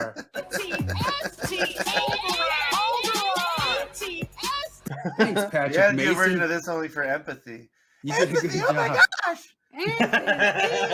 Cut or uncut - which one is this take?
uncut